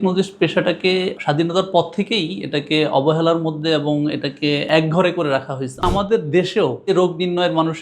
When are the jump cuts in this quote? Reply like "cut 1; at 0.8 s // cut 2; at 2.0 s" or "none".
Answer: cut 1; at 1.1 s // cut 2; at 4.7 s // cut 3; at 5.8 s // cut 4; at 6.9 s